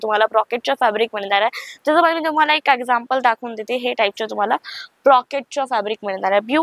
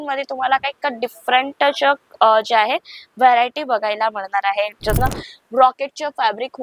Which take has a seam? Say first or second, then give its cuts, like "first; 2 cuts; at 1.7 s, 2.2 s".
second; 1 cut; at 5.0 s